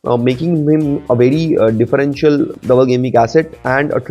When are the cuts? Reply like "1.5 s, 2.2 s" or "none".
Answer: 2.5 s